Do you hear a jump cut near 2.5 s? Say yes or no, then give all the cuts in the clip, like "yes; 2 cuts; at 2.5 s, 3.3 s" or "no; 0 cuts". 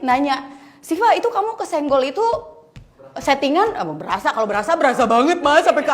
no; 0 cuts